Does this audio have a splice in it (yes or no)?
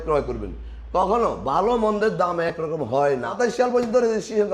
yes